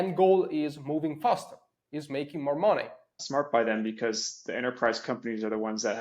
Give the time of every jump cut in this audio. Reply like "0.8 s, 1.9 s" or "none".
3.1 s